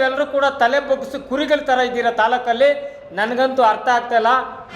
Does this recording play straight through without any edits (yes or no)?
yes